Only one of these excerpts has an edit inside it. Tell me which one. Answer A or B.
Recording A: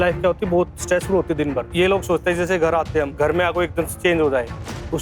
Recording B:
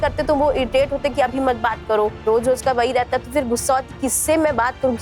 A